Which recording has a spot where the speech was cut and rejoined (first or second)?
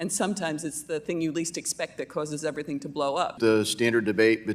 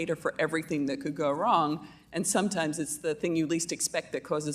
first